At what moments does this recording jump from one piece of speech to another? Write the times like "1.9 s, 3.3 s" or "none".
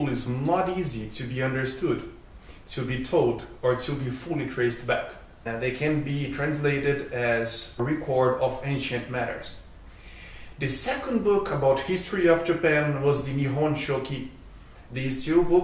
none